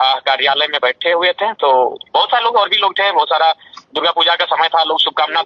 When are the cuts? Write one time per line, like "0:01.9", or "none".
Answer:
none